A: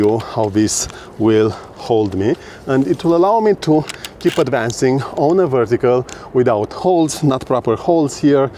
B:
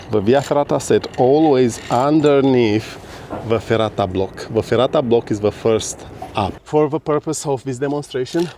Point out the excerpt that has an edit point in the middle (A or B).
B